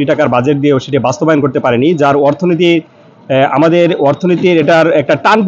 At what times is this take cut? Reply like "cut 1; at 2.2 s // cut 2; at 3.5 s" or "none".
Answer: none